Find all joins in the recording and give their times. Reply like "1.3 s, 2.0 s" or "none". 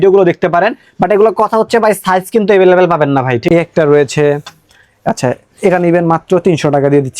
3.4 s